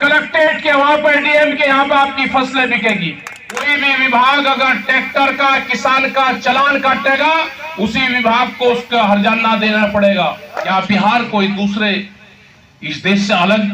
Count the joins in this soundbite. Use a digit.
2